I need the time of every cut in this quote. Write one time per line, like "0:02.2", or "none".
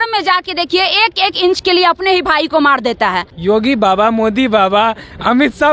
0:03.3